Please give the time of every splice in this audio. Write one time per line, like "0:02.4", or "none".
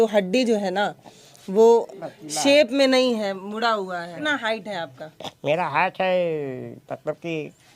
0:04.2

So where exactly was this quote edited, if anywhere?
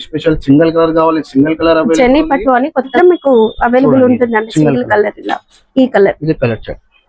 0:02.9

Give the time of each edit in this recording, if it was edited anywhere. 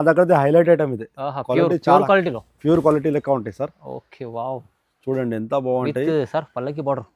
none

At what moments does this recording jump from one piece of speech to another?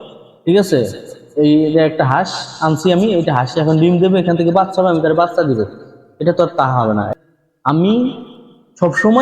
0:07.1

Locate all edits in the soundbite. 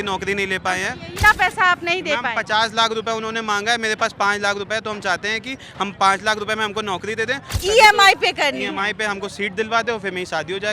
0:01.2
0:07.5

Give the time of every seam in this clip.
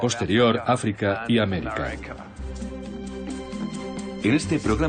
0:01.2

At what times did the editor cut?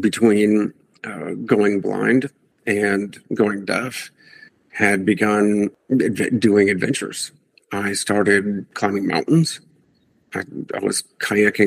0:05.8
0:08.7

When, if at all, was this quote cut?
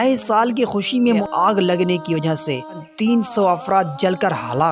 0:01.3
0:02.9

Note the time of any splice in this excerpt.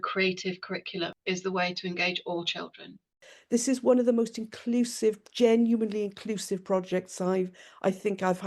0:01.2
0:03.3

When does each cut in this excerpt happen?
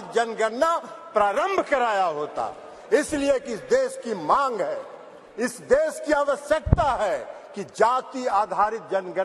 none

